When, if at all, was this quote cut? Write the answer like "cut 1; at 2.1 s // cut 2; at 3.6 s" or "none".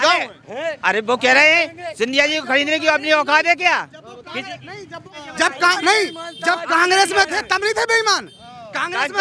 cut 1; at 5.1 s